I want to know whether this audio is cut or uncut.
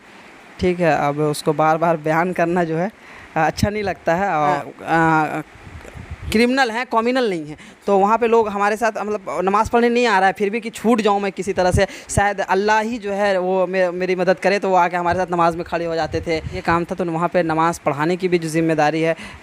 cut